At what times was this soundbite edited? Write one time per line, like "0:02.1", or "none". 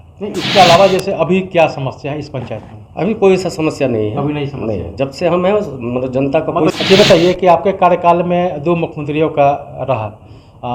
0:06.7